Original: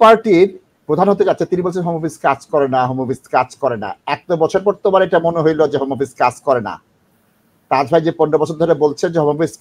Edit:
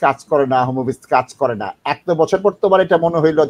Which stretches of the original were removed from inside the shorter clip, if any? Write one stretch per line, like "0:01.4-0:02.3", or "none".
none